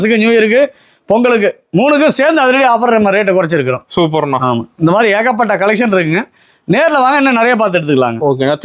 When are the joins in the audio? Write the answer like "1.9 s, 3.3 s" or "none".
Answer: none